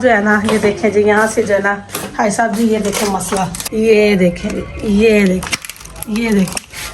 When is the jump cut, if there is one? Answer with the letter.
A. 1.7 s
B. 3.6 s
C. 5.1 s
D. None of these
B